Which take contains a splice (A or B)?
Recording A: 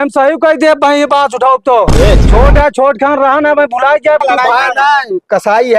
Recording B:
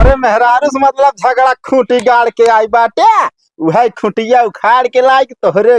A